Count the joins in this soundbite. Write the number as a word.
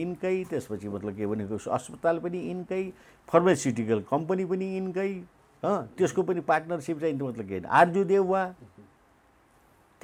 zero